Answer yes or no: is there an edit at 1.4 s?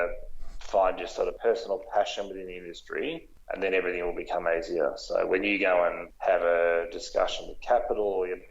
yes